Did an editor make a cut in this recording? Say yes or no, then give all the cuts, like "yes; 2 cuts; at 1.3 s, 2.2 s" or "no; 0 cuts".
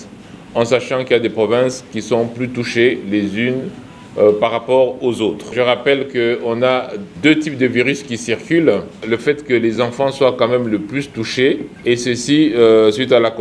yes; 4 cuts; at 5.5 s, 7.0 s, 8.9 s, 11.7 s